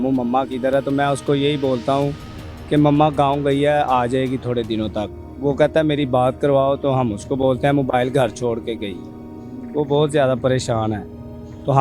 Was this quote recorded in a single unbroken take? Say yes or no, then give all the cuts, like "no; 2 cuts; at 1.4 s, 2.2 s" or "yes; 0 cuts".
yes; 0 cuts